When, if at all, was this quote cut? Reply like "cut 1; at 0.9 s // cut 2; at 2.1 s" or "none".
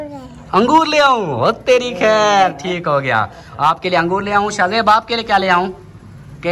none